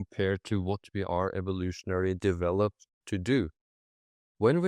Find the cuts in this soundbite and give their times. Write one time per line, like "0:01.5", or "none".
none

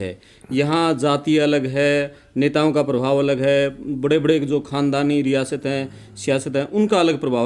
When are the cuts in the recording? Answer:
none

